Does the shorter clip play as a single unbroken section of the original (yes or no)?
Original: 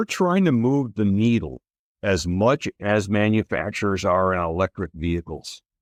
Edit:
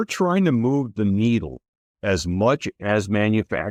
yes